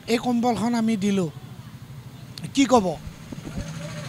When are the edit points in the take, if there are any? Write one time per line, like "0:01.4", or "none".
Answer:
none